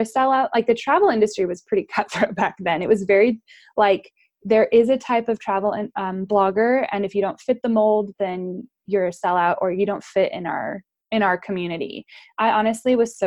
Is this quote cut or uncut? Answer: uncut